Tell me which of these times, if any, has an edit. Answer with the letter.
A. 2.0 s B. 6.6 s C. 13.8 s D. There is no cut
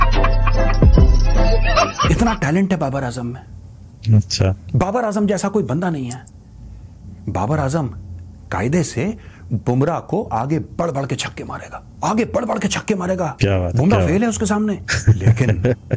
A